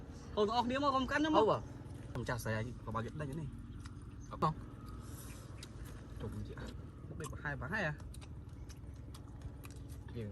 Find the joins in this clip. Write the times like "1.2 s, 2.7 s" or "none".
2.2 s, 4.4 s, 6.7 s